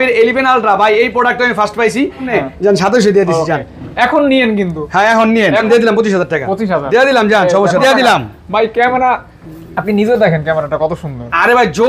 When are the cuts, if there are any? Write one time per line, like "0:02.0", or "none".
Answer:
0:02.3
0:05.7
0:07.8